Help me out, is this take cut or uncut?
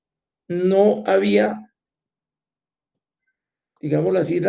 uncut